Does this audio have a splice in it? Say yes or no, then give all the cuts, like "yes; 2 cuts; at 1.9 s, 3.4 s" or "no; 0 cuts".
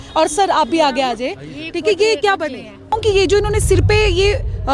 yes; 1 cut; at 2.9 s